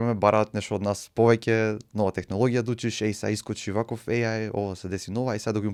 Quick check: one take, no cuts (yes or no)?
yes